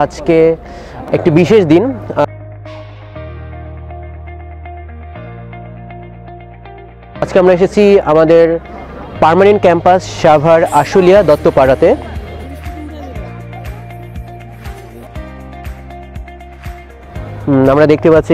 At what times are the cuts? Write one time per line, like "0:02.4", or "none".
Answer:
none